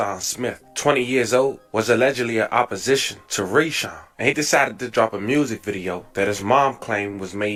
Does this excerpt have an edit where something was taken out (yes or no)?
no